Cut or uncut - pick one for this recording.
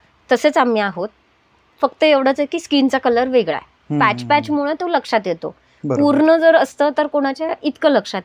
uncut